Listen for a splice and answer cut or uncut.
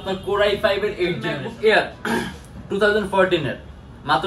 cut